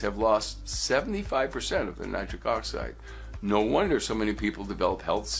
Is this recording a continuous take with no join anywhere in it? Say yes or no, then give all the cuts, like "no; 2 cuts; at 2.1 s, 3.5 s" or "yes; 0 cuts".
yes; 0 cuts